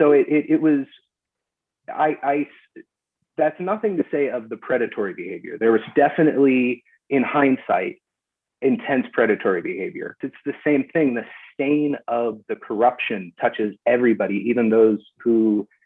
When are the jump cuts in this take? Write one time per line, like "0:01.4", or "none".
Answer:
0:10.3